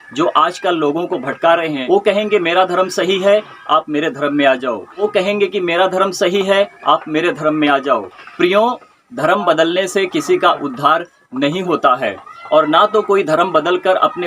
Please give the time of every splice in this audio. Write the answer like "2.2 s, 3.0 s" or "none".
1.8 s, 5.0 s, 8.2 s